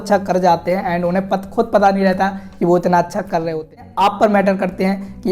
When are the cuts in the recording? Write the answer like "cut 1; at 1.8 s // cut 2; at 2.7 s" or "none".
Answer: cut 1; at 3.9 s